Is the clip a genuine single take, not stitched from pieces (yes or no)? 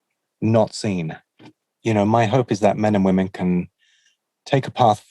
no